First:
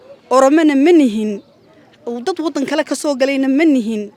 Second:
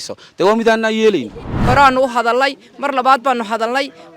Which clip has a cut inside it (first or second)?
second